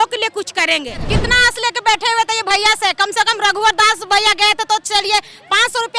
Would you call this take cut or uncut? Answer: cut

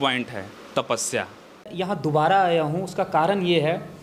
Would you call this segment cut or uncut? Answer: cut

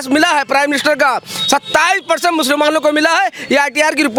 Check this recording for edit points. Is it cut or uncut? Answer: uncut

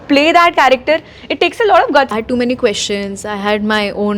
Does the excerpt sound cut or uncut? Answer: cut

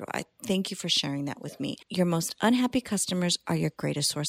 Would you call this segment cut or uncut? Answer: cut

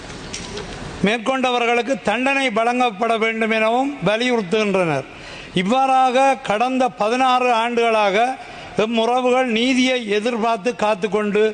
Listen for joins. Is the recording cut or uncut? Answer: uncut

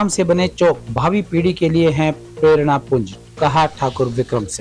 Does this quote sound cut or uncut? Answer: uncut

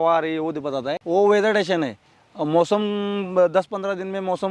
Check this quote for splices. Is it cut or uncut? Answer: cut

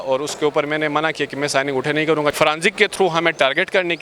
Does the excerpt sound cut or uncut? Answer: cut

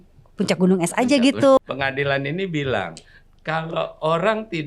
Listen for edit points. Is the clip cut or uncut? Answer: cut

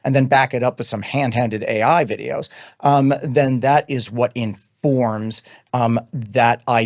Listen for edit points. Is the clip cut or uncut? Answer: uncut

